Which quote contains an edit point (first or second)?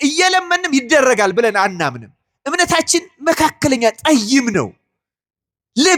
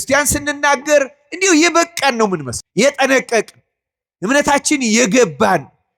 second